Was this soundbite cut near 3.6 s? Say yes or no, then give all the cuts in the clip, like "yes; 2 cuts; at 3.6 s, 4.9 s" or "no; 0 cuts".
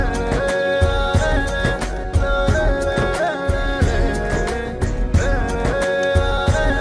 yes; 1 cut; at 3.6 s